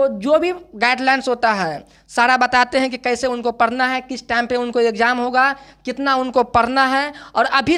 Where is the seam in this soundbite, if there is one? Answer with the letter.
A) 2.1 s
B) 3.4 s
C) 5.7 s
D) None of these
D